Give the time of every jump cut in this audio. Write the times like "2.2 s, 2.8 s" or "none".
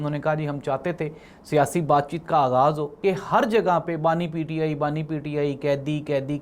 2.9 s